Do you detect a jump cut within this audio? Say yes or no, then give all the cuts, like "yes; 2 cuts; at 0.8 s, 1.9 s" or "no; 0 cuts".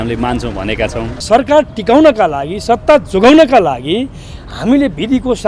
yes; 1 cut; at 1.2 s